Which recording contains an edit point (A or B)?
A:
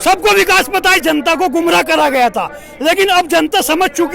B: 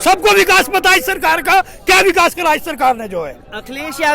A